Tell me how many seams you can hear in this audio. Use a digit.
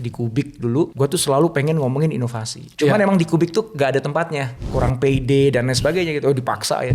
2